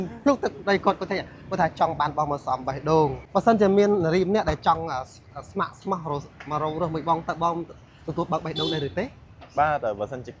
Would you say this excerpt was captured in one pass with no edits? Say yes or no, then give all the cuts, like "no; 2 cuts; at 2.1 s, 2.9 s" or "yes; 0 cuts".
no; 1 cut; at 3.2 s